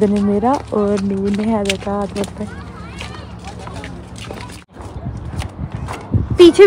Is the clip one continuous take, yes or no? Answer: no